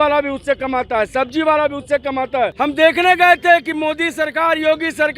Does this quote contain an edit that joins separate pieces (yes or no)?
yes